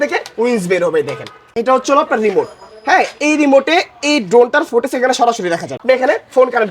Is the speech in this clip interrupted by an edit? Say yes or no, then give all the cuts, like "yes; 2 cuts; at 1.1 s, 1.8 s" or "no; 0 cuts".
yes; 2 cuts; at 1.5 s, 5.8 s